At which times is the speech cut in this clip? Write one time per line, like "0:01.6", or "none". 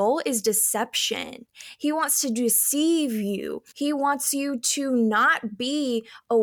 0:03.6